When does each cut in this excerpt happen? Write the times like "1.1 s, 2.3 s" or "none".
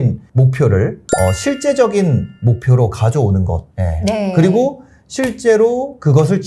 none